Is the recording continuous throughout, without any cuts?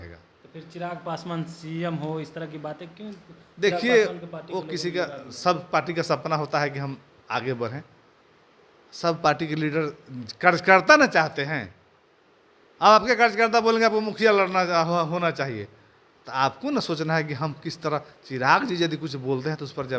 yes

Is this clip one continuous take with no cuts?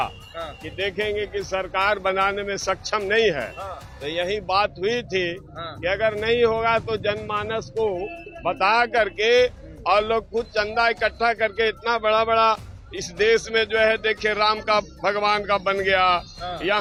yes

